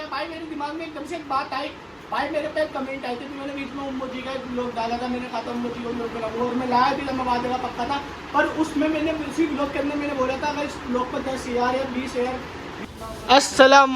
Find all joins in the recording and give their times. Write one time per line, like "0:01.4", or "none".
0:12.9